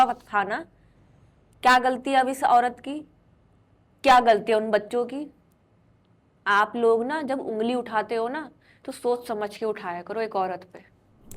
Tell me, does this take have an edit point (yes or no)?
no